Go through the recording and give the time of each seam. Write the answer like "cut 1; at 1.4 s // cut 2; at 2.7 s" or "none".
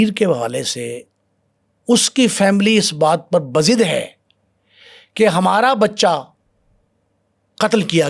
none